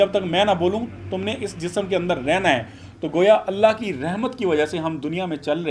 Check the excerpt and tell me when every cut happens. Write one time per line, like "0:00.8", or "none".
none